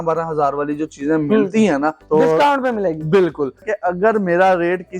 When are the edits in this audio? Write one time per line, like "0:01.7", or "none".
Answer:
0:02.0
0:03.7